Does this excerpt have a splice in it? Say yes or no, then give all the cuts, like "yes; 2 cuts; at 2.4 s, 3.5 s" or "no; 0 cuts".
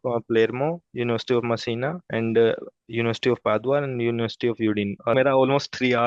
yes; 2 cuts; at 2.0 s, 5.1 s